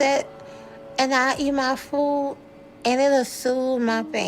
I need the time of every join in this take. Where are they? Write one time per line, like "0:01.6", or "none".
none